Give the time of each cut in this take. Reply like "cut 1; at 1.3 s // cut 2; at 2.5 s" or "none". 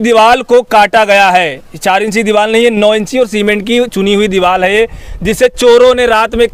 none